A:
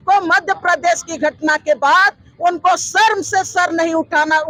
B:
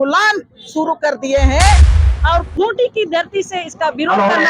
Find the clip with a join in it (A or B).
B